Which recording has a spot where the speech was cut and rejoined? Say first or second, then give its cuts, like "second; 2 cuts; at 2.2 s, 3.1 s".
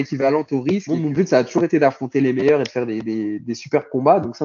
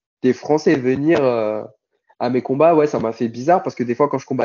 first; 1 cut; at 0.9 s